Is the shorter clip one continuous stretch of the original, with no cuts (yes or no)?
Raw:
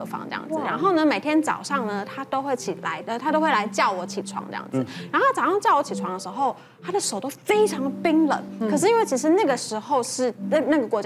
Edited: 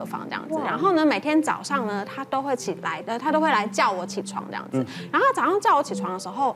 yes